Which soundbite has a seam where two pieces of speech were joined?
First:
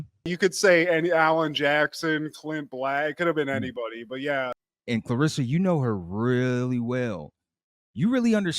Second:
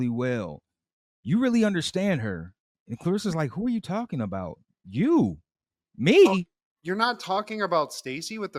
first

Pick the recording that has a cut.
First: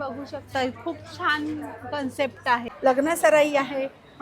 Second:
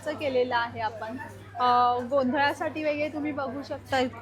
first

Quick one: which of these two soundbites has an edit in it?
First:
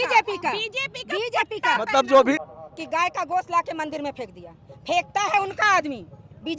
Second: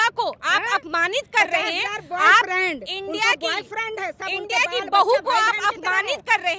first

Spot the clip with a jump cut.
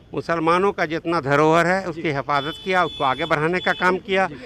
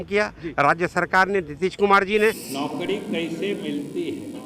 second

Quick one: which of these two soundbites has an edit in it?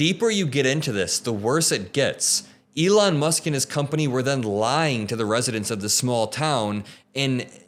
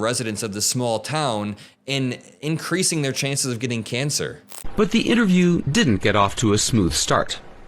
second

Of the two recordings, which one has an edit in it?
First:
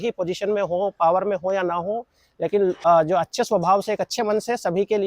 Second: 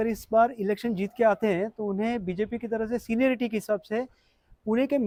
first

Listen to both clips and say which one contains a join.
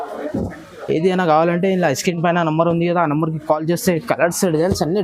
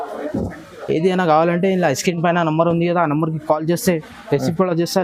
first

